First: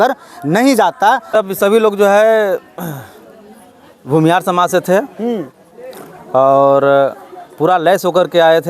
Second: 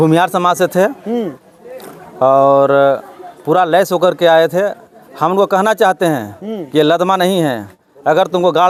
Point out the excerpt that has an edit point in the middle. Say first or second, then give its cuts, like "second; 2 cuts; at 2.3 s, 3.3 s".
first; 1 cut; at 1.3 s